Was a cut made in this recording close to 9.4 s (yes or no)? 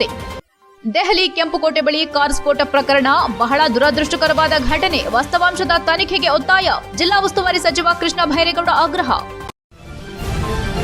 yes